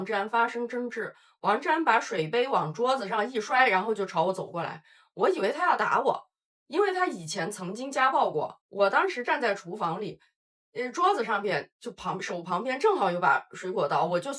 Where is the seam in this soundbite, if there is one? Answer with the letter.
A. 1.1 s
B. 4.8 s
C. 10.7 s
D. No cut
D